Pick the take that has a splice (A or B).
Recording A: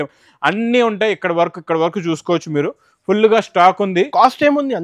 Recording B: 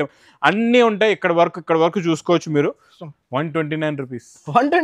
B